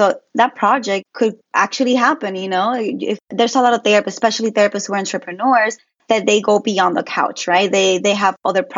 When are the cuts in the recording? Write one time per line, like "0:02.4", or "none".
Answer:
0:01.2